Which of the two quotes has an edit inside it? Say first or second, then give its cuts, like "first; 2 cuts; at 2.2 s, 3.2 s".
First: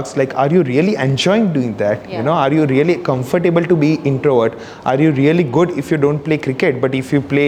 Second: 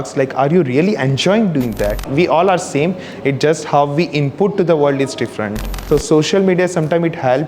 second; 2 cuts; at 2.1 s, 5.8 s